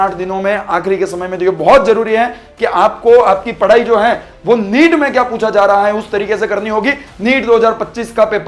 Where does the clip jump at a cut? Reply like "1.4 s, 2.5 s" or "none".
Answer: 7.1 s

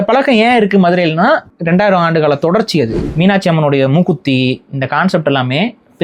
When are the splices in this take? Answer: 1.5 s, 3.0 s

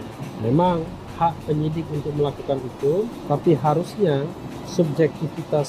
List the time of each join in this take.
3.2 s

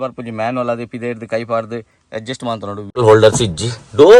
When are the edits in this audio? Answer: 3.0 s

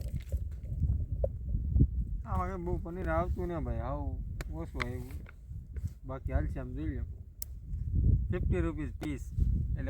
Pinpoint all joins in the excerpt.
none

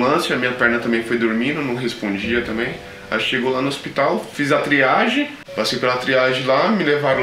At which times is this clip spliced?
none

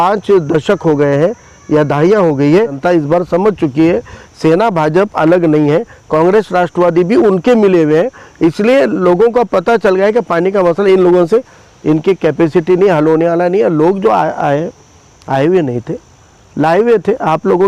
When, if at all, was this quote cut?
2.8 s

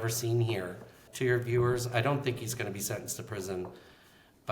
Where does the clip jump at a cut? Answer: 1.0 s

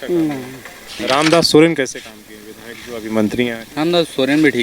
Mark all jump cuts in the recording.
1.0 s, 3.6 s

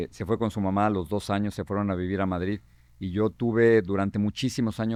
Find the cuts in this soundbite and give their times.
none

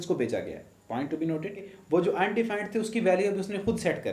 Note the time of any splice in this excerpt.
1.7 s

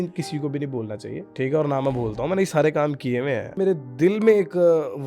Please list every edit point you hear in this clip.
1.3 s, 3.6 s

